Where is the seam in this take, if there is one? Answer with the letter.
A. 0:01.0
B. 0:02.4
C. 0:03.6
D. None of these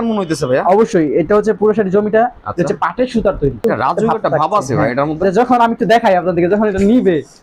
C